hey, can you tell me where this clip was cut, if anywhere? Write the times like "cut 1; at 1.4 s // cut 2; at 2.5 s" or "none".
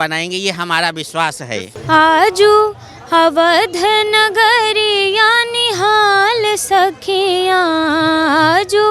cut 1; at 1.7 s